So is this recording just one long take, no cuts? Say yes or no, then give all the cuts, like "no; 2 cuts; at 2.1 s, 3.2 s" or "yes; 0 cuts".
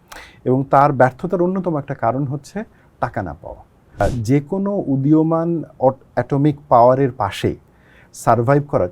no; 1 cut; at 4.0 s